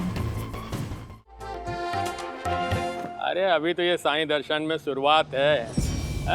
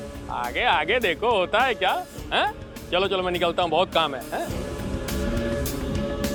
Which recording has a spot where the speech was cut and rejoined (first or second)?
first